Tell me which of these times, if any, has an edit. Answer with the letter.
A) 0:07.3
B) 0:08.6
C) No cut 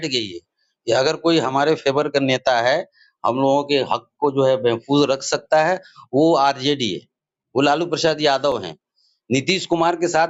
C